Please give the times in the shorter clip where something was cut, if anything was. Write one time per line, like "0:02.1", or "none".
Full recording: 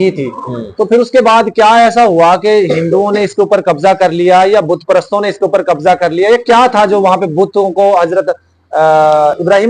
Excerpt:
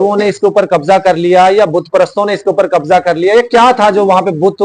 none